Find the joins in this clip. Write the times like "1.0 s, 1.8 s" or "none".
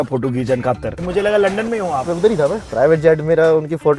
1.0 s, 2.2 s

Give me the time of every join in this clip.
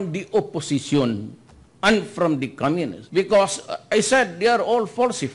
3.0 s

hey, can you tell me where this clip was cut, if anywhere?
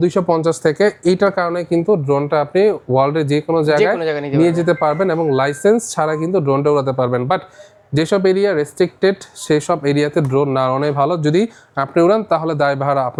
none

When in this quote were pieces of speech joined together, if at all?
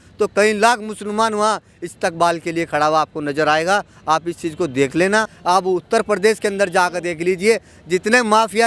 5.3 s

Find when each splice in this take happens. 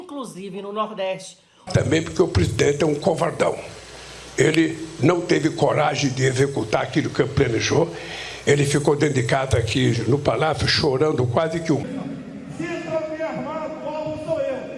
1.7 s, 11.8 s

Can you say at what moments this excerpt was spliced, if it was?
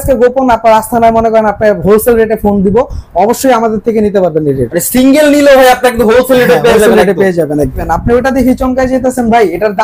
7.8 s

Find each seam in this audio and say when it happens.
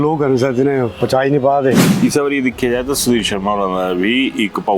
1.9 s

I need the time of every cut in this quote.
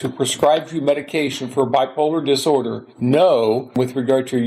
2.8 s, 3.7 s

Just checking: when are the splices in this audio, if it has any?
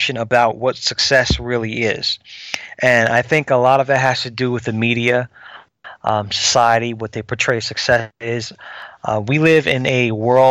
none

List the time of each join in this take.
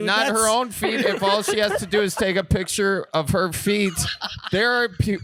none

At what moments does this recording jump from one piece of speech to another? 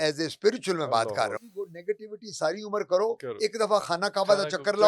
1.5 s

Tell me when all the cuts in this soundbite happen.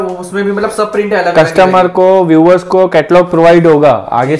none

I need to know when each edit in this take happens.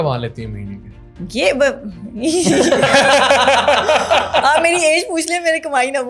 none

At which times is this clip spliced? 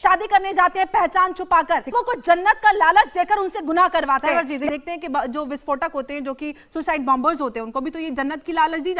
1.9 s, 4.7 s

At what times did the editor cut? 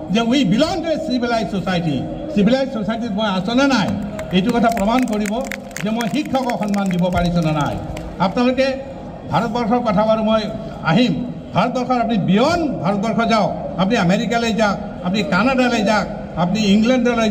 none

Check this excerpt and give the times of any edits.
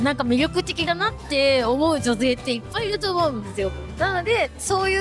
3.8 s

